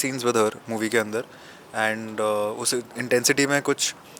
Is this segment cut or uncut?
uncut